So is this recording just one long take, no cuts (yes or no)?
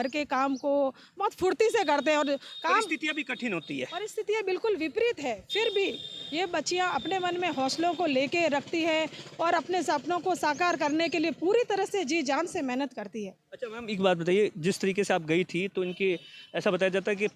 yes